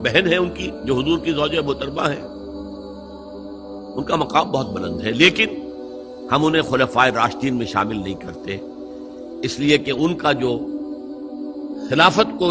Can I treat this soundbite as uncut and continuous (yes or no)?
yes